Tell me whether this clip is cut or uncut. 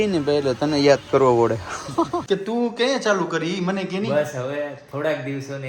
cut